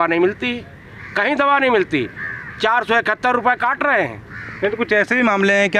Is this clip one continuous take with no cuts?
yes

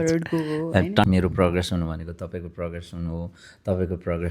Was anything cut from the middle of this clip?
yes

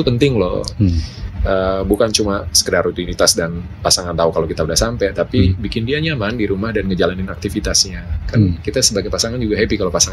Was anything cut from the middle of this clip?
no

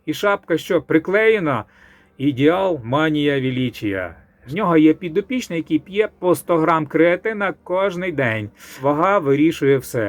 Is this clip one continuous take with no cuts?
no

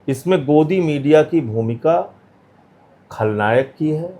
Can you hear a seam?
no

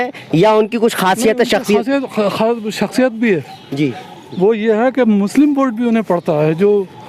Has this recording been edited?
no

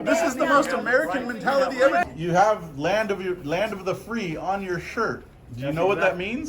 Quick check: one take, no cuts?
no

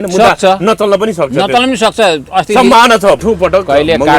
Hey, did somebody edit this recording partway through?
yes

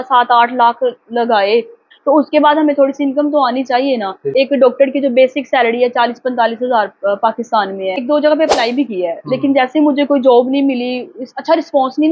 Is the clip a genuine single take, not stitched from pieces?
no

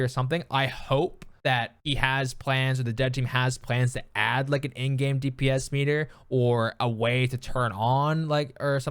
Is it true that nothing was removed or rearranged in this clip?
no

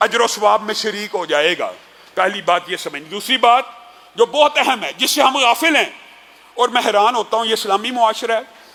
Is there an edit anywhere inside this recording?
no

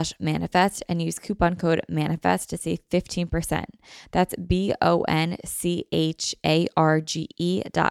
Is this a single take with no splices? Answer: yes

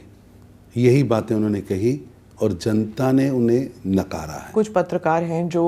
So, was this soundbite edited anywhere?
yes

